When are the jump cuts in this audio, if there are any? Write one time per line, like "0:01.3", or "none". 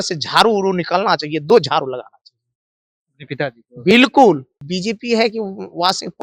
0:04.5